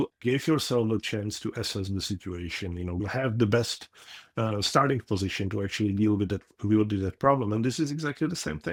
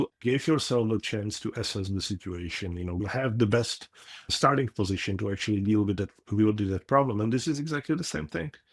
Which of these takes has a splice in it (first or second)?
second